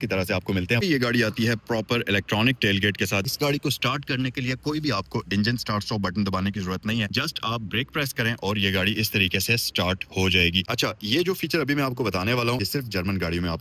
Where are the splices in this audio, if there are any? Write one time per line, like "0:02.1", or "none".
0:00.8
0:03.3
0:07.1
0:10.7
0:12.6